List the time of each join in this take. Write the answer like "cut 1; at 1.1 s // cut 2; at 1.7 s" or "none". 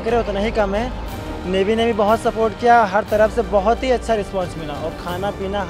none